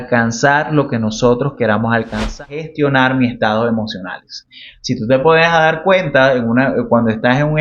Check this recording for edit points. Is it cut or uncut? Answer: cut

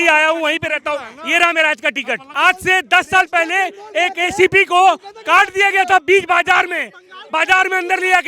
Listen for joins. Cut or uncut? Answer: cut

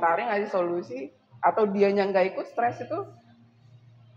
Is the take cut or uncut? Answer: uncut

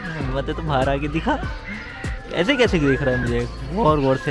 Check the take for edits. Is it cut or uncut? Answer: cut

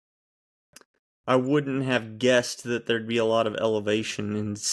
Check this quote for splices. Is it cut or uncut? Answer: uncut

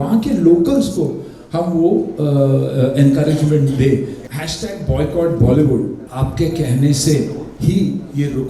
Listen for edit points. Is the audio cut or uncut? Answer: cut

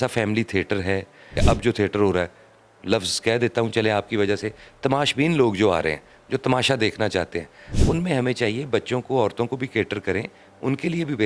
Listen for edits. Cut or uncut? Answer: cut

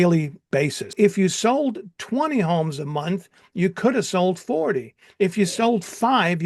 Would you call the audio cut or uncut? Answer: cut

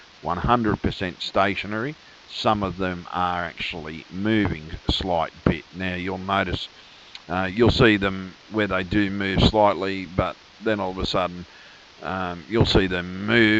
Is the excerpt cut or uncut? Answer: uncut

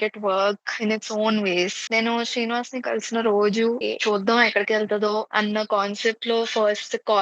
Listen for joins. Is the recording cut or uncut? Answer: cut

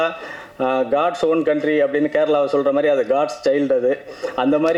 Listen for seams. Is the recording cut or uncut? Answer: uncut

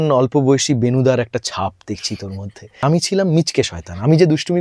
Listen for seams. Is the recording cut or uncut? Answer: cut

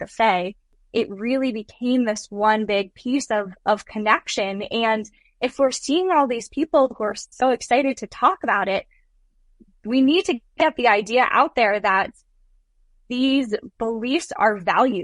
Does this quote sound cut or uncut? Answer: uncut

